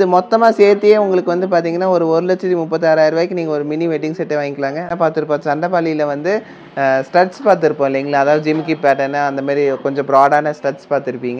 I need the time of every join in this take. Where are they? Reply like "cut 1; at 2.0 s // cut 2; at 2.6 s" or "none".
cut 1; at 4.8 s